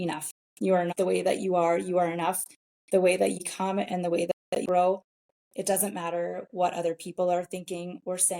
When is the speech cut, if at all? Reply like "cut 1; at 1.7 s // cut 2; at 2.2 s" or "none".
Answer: cut 1; at 0.9 s // cut 2; at 3.4 s